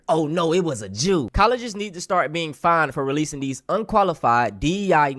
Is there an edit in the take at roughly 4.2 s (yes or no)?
no